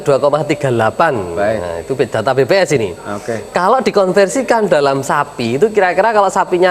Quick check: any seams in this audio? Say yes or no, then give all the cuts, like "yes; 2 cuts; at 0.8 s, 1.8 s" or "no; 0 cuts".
no; 0 cuts